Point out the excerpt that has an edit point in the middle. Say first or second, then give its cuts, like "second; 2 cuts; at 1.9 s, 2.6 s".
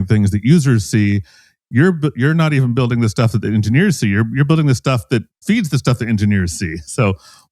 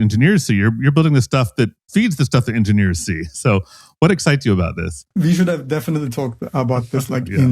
second; 1 cut; at 5.0 s